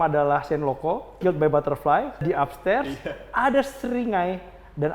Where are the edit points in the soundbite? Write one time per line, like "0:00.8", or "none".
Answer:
0:01.2
0:02.2